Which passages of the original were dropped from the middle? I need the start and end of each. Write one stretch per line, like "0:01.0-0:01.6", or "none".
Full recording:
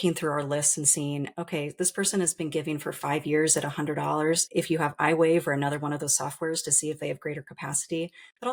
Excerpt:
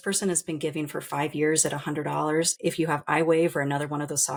none